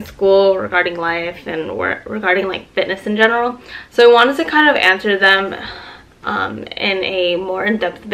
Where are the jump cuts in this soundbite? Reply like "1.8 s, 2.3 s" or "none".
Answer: none

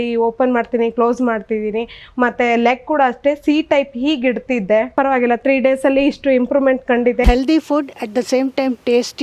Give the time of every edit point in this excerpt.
4.9 s, 7.2 s

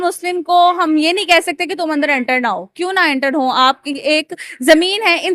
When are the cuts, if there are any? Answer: none

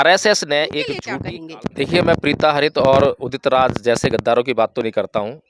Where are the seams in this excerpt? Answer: 1.1 s

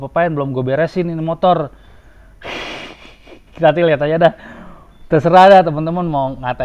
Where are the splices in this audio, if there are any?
none

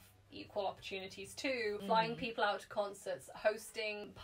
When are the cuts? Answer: 1.8 s

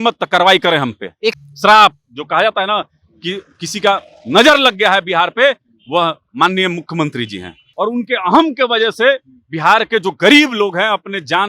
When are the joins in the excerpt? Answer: 1.3 s, 7.6 s

